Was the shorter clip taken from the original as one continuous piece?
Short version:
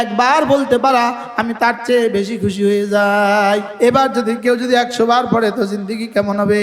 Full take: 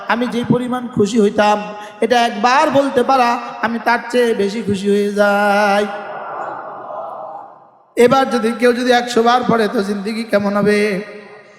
no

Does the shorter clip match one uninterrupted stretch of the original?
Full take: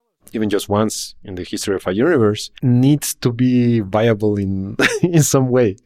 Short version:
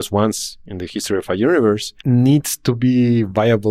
yes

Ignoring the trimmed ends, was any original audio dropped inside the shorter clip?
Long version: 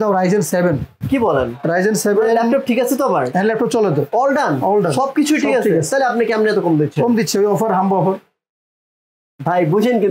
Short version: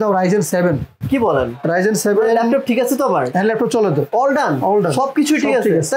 no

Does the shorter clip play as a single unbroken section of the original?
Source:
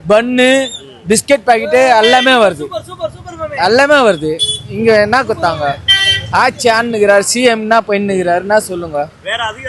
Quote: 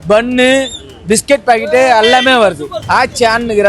no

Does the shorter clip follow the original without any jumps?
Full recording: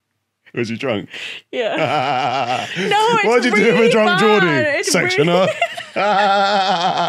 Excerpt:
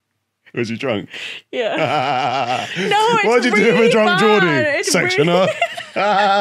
yes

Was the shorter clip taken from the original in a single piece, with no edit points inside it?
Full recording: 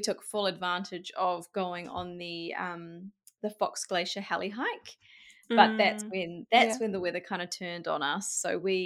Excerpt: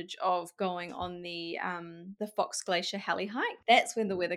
no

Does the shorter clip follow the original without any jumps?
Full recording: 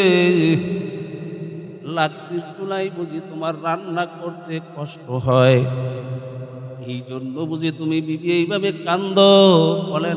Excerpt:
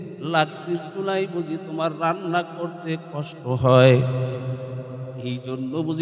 yes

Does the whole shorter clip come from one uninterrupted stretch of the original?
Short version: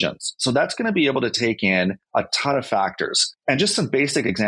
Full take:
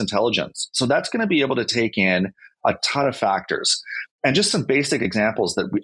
no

